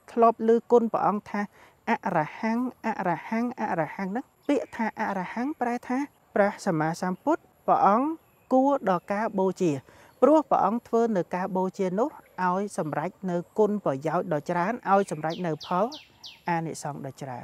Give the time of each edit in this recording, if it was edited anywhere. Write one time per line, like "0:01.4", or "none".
0:04.3
0:06.2
0:07.5